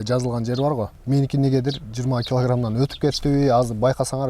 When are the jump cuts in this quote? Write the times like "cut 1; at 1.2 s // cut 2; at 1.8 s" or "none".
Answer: cut 1; at 1.0 s